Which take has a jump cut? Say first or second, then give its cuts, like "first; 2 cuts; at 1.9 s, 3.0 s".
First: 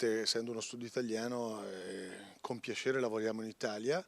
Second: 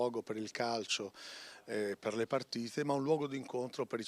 first; 1 cut; at 1.3 s